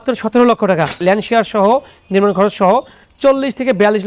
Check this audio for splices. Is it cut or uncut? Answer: cut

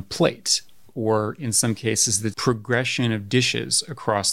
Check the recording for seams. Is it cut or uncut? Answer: cut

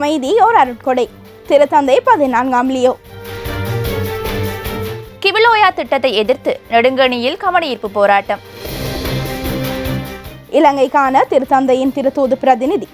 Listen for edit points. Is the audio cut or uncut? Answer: cut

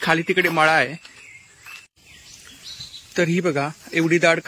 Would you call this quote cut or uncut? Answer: cut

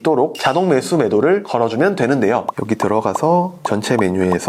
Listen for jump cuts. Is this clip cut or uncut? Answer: uncut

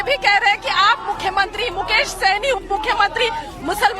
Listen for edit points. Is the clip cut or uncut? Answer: cut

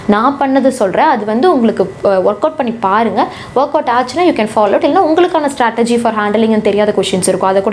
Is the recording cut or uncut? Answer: uncut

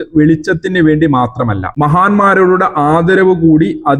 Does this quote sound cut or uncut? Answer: uncut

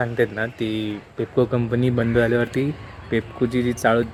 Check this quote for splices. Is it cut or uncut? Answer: uncut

